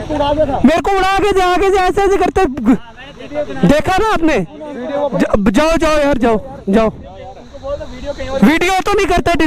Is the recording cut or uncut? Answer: cut